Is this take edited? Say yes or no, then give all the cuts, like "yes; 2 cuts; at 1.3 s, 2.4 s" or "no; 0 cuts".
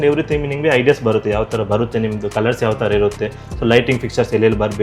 no; 0 cuts